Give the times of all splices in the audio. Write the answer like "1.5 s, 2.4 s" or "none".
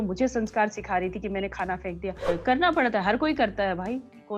2.3 s